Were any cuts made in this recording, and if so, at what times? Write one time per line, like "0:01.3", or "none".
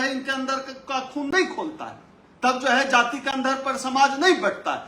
none